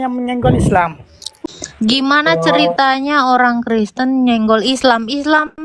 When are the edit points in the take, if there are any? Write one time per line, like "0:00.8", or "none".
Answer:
0:01.3